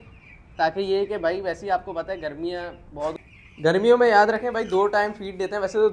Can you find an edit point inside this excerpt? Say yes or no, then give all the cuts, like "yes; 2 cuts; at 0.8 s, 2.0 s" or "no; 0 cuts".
yes; 1 cut; at 3.2 s